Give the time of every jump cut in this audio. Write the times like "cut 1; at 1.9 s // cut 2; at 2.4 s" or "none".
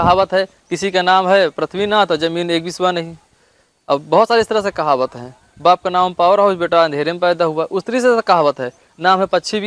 none